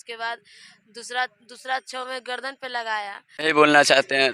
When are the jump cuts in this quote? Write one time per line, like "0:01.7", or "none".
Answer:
0:03.3